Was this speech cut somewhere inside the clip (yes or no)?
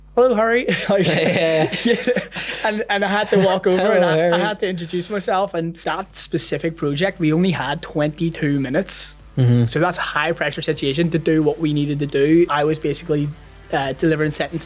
yes